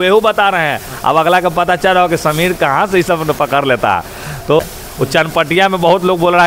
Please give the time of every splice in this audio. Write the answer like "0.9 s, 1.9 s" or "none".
4.6 s